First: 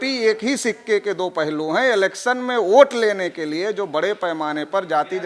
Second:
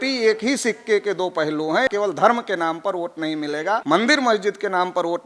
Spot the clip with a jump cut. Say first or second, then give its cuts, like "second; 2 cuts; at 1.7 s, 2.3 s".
second; 2 cuts; at 1.9 s, 3.8 s